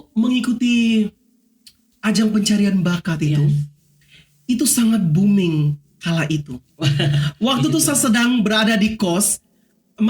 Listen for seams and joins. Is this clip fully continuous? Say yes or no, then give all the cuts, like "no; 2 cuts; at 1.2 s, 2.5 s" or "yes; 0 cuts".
yes; 0 cuts